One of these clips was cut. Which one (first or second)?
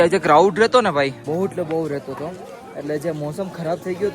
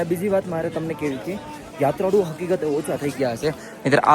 first